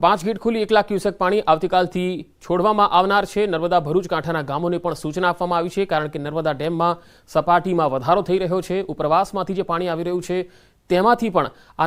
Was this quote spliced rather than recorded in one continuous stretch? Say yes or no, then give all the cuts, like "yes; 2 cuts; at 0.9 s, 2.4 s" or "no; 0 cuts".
yes; 1 cut; at 5.3 s